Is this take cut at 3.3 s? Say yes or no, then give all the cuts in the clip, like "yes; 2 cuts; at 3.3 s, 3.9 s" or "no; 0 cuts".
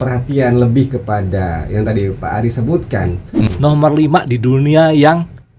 yes; 1 cut; at 3.3 s